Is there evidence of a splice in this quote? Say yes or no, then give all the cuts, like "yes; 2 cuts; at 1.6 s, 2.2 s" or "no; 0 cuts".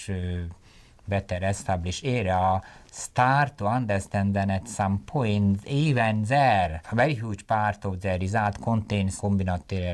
yes; 2 cuts; at 6.9 s, 9.1 s